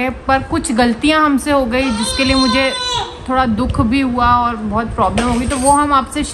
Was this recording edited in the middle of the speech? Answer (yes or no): no